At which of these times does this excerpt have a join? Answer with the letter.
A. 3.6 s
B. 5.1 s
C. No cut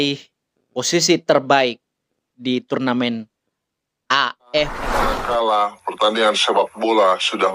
B